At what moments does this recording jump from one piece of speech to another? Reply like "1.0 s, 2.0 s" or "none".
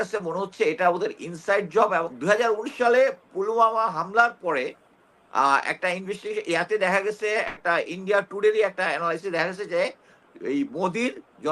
2.1 s